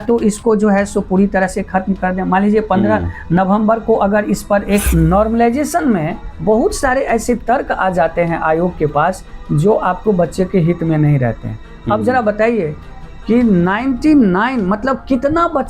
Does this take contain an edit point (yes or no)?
yes